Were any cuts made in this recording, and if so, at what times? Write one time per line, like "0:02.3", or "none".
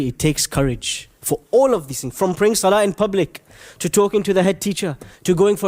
none